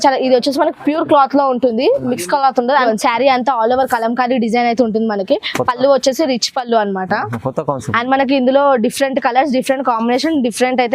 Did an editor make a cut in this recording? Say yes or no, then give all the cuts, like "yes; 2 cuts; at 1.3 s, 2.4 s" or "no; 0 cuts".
yes; 1 cut; at 2.9 s